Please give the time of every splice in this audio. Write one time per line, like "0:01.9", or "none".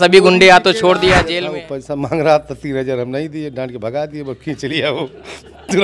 0:01.3